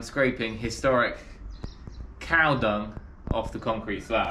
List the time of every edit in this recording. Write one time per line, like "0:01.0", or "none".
none